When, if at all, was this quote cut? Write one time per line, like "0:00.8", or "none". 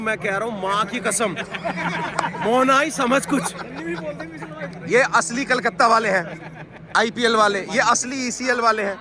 0:04.7